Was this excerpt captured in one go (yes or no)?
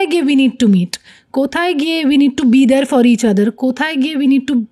yes